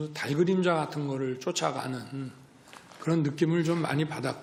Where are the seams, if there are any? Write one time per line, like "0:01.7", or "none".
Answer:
none